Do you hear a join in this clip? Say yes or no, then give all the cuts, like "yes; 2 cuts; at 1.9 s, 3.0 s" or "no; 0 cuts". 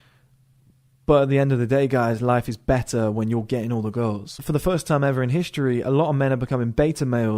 yes; 1 cut; at 4.4 s